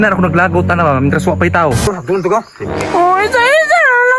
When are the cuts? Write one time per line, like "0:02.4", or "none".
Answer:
0:01.9